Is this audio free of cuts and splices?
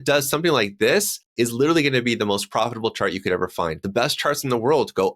no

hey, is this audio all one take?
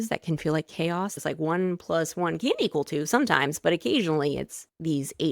no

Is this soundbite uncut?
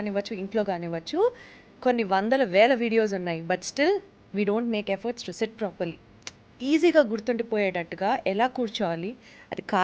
yes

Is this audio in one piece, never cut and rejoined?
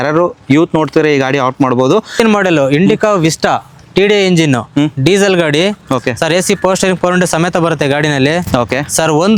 yes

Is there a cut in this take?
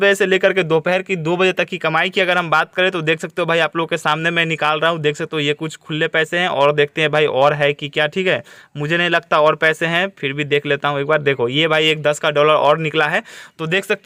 no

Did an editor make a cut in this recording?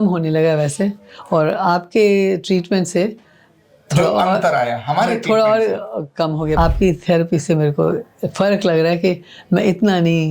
yes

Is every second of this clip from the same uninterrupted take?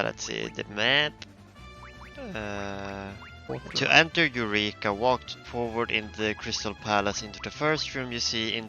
no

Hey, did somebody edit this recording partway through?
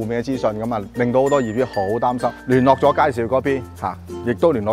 yes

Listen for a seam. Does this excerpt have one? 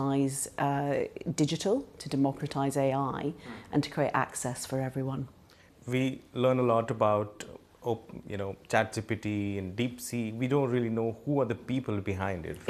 yes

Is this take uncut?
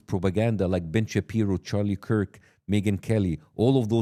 yes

